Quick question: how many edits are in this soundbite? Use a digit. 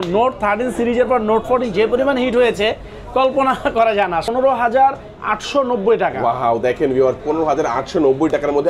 1